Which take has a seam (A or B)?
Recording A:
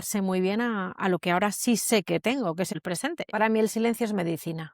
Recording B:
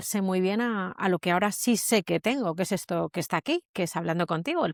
A